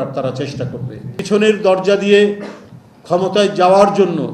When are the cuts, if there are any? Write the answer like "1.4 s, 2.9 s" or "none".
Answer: 1.2 s

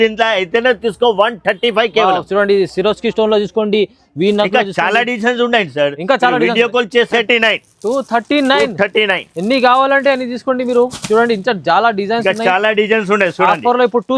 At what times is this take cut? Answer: 7.2 s

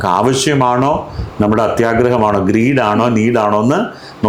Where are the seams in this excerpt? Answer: none

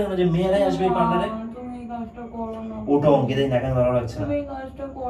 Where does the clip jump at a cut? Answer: none

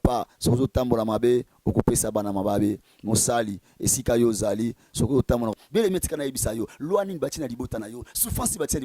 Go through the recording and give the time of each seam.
5.5 s

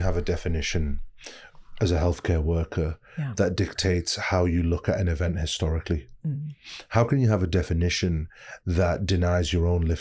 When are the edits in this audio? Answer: none

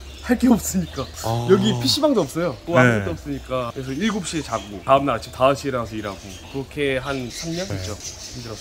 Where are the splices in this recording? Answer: none

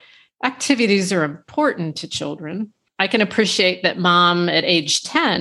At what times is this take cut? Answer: 2.8 s

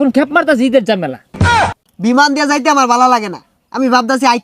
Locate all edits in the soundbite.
1.4 s

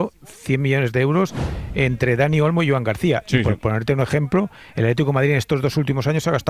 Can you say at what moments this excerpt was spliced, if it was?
none

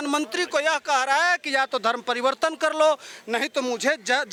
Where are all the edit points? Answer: none

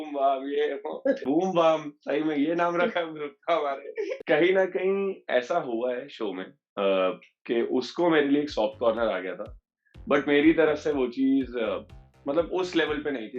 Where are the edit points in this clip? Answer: 1.2 s, 4.2 s

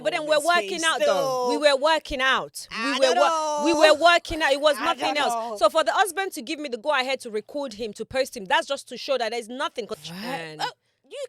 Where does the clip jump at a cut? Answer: 9.9 s

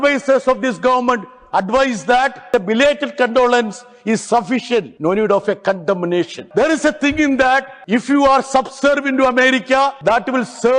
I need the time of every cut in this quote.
2.4 s, 4.9 s, 6.4 s, 7.7 s, 10.0 s

